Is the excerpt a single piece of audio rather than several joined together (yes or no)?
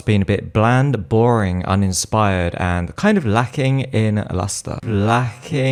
yes